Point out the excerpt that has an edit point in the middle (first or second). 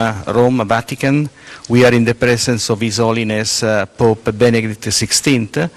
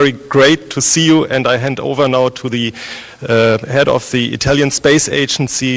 second